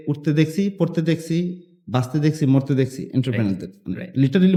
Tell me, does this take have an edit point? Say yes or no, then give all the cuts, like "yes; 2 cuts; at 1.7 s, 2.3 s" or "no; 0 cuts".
no; 0 cuts